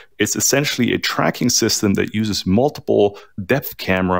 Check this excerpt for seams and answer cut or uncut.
uncut